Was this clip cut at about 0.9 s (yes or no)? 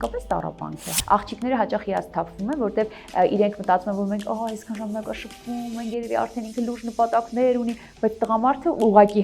yes